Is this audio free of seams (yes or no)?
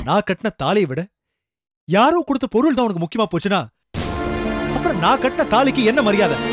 yes